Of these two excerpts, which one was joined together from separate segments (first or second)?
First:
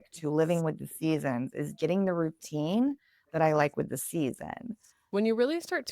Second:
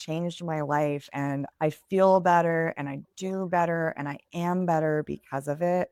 first